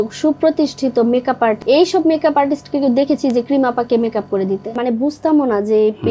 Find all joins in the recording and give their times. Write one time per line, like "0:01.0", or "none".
0:01.6
0:04.8